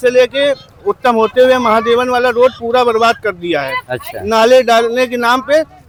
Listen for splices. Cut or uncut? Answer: uncut